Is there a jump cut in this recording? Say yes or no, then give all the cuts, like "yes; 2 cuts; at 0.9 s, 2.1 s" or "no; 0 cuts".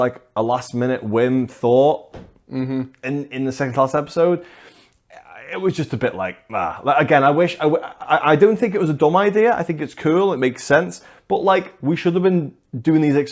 no; 0 cuts